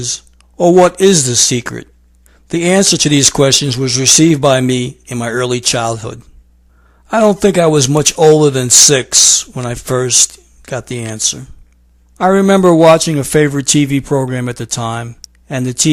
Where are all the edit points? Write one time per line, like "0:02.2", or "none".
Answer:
0:10.6